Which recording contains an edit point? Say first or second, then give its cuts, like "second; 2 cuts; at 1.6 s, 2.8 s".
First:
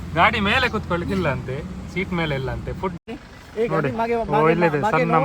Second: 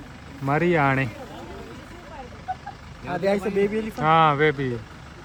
first; 1 cut; at 3.0 s